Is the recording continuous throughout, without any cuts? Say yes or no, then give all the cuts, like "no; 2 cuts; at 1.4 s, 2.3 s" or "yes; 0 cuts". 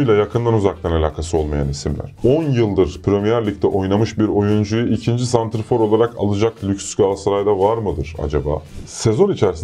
no; 2 cuts; at 2.1 s, 8.7 s